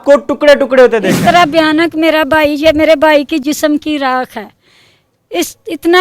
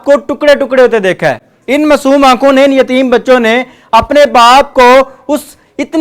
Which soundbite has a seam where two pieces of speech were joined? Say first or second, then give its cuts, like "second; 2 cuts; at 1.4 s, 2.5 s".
first; 1 cut; at 1.1 s